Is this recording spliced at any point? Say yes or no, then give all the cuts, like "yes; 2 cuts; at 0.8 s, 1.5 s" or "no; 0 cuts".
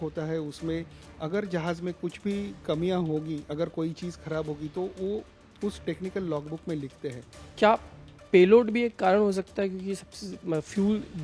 yes; 1 cut; at 7.4 s